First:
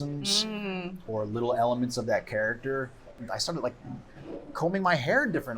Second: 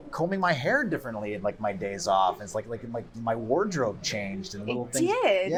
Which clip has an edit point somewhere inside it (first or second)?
first